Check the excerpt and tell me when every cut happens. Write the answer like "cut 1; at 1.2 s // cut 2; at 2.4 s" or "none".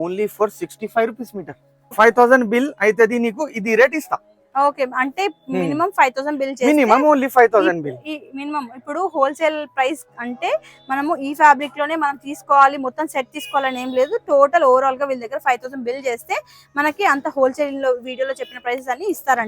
cut 1; at 1.9 s